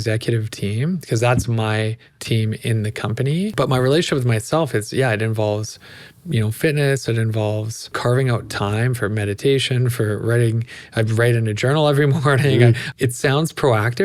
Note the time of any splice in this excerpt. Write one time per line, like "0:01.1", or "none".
0:03.5
0:07.9
0:12.8

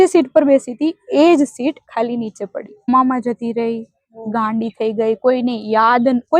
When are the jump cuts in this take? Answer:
0:02.9

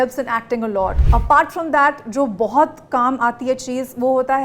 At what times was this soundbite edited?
0:01.0

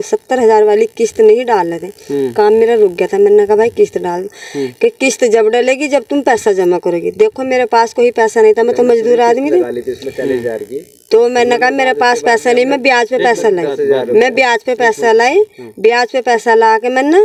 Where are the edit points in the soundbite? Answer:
none

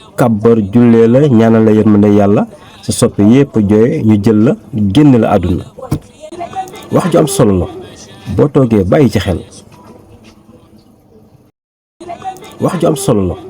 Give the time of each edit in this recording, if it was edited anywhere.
0:11.9

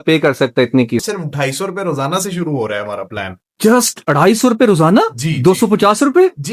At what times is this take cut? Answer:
0:01.1

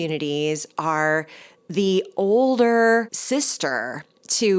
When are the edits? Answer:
0:03.2

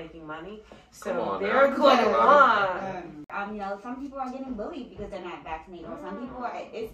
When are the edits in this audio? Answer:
0:03.3

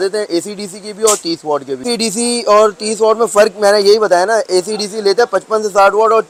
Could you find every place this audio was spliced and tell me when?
none

